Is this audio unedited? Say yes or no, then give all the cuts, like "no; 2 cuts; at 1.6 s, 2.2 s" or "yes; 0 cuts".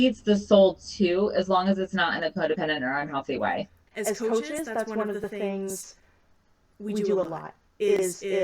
no; 1 cut; at 3.8 s